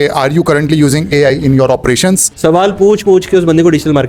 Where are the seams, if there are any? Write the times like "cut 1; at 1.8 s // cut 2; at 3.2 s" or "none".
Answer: cut 1; at 2.3 s

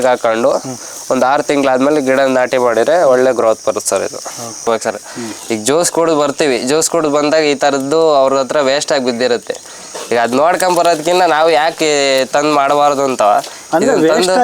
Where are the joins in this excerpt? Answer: cut 1; at 4.7 s

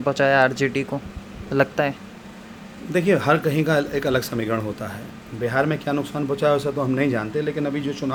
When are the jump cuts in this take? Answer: none

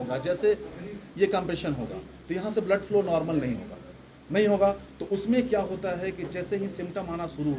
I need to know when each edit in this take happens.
none

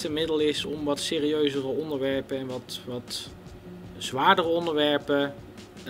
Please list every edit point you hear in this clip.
none

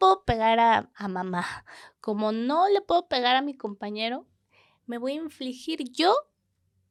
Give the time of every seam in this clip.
none

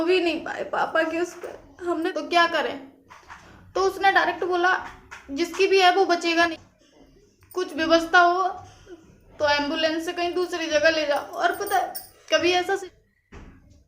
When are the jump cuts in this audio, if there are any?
cut 1; at 2.1 s // cut 2; at 6.5 s // cut 3; at 12.8 s

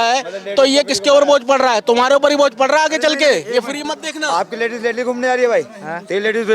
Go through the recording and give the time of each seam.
none

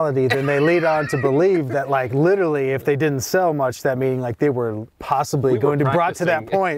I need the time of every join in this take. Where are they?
cut 1; at 4.9 s

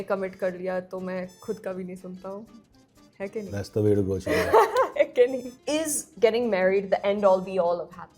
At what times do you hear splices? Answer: cut 1; at 5.5 s

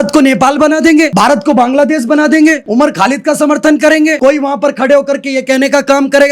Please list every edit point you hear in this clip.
cut 1; at 1.1 s // cut 2; at 2.6 s // cut 3; at 4.2 s

